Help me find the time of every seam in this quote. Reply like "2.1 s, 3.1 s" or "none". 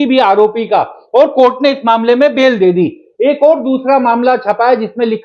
none